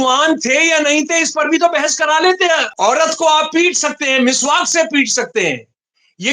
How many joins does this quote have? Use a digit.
1